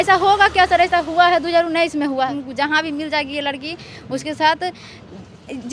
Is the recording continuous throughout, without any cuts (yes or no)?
no